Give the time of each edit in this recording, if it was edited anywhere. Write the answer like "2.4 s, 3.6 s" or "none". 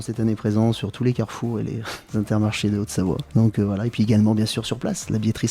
1.9 s, 3.2 s